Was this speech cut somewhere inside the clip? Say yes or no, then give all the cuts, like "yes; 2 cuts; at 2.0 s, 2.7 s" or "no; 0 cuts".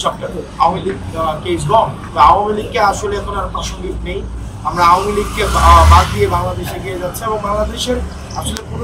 yes; 1 cut; at 2.0 s